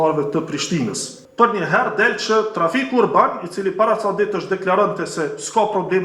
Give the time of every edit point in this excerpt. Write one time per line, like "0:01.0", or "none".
0:01.2